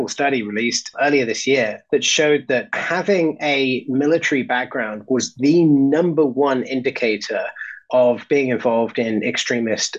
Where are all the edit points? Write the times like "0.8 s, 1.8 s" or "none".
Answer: 1.8 s, 2.8 s